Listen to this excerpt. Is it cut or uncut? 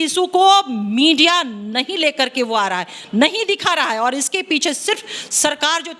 uncut